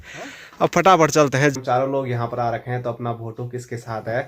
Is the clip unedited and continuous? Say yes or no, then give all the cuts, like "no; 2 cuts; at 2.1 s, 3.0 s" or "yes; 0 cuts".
no; 1 cut; at 1.5 s